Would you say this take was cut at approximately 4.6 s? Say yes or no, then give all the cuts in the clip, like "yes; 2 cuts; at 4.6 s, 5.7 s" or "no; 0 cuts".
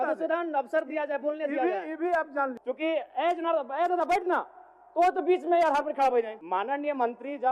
no; 2 cuts; at 2.6 s, 6.4 s